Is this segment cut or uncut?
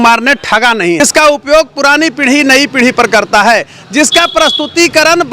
cut